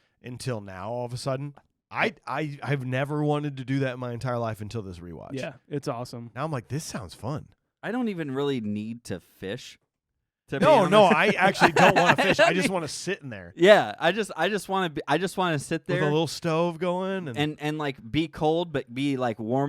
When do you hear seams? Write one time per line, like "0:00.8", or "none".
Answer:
0:01.6